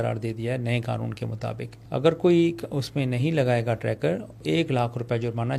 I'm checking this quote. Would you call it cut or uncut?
cut